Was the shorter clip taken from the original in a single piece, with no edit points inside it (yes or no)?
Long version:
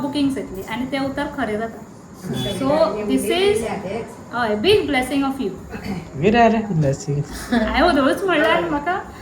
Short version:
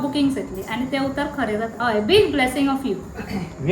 no